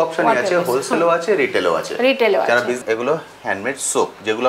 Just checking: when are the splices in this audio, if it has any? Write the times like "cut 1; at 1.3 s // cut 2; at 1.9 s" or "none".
cut 1; at 2.8 s